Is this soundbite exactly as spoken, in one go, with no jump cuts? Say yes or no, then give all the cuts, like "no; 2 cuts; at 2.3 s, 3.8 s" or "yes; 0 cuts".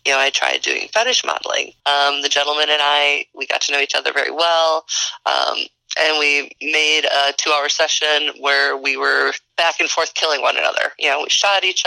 no; 2 cuts; at 1.7 s, 9.4 s